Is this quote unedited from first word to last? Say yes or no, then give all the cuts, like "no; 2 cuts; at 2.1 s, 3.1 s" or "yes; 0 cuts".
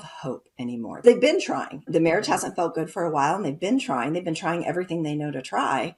no; 2 cuts; at 1.0 s, 1.9 s